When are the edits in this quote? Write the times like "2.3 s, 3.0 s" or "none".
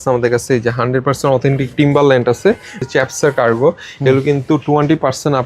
2.8 s